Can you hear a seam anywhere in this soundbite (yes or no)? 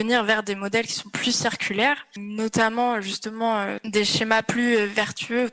yes